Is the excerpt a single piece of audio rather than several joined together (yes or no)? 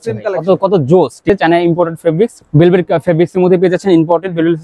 no